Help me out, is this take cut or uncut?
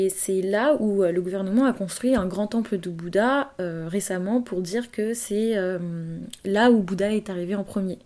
uncut